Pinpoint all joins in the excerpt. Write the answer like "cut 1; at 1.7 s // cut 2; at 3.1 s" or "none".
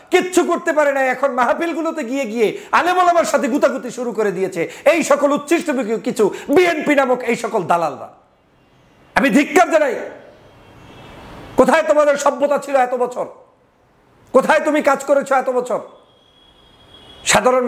none